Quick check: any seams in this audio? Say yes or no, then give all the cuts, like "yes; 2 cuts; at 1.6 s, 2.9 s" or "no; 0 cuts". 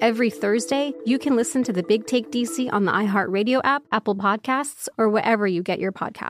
yes; 2 cuts; at 1.0 s, 3.8 s